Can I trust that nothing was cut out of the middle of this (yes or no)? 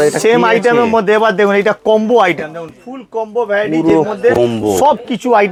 yes